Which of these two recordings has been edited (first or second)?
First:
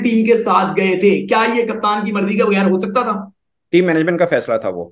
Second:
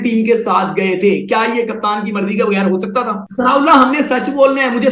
second